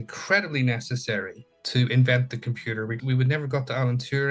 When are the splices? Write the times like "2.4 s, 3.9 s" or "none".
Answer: 2.9 s